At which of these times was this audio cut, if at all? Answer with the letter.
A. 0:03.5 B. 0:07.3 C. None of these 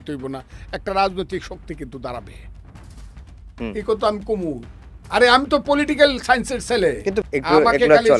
B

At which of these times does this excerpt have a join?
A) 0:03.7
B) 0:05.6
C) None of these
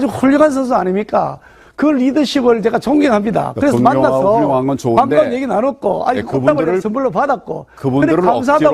C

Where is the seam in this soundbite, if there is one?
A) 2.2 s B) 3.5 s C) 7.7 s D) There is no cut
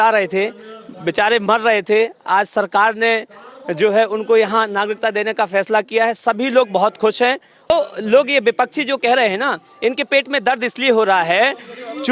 C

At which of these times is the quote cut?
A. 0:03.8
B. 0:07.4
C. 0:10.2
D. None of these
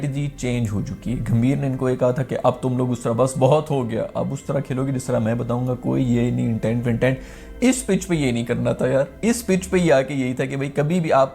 D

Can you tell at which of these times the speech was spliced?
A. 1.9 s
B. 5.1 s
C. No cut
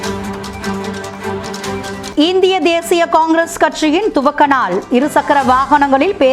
A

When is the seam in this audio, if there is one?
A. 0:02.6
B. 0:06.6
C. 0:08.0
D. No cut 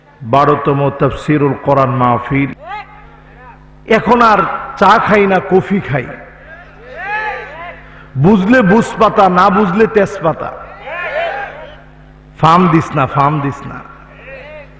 A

